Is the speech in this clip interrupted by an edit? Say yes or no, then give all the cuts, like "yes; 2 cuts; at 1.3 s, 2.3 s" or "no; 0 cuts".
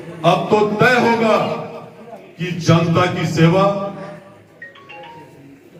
no; 0 cuts